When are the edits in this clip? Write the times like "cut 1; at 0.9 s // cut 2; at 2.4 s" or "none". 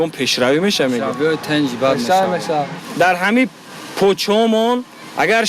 cut 1; at 2.8 s